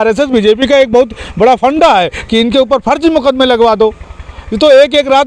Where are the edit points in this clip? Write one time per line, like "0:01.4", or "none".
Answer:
none